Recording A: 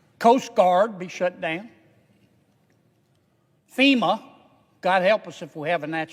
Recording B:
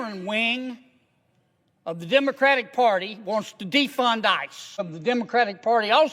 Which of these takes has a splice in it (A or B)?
B